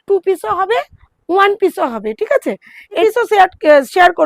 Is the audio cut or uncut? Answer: cut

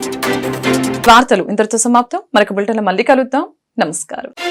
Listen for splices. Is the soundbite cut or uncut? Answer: uncut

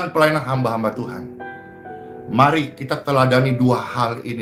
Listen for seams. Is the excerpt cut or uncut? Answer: uncut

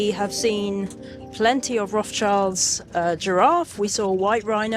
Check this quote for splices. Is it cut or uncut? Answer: uncut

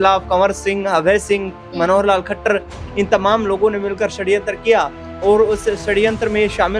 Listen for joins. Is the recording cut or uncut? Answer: uncut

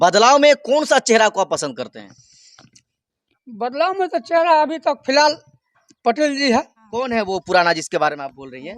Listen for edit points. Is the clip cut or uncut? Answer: cut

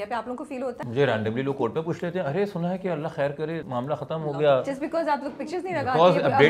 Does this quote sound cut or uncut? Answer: cut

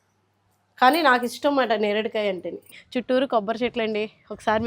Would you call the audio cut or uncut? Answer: cut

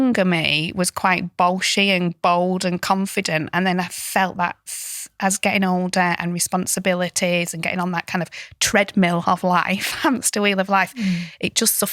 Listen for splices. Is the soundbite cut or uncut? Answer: uncut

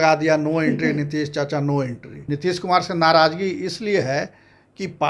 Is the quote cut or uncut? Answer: cut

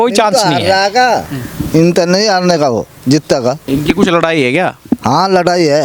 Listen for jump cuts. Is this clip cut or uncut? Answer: cut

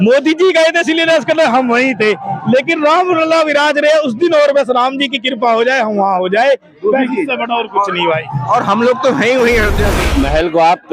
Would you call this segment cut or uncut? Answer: cut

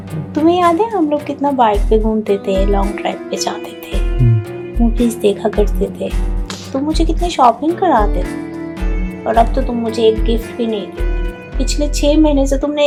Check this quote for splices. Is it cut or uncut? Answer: uncut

